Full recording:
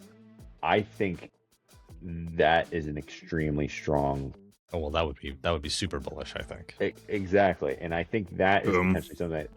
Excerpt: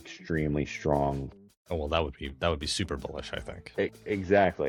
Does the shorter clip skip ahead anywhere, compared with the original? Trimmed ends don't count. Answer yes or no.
no